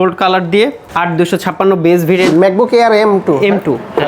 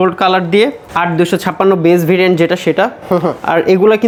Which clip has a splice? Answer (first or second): first